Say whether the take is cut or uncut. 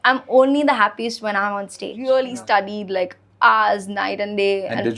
cut